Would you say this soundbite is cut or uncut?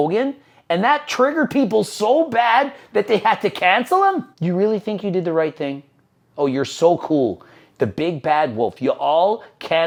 uncut